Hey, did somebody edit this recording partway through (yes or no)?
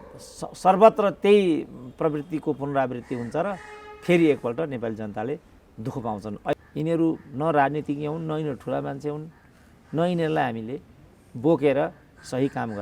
yes